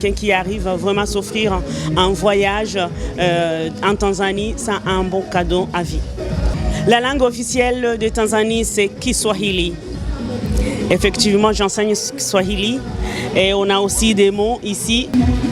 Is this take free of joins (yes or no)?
yes